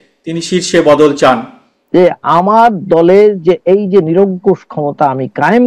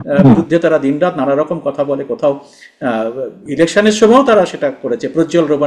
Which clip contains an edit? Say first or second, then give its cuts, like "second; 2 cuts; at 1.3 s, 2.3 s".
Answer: first; 1 cut; at 1.8 s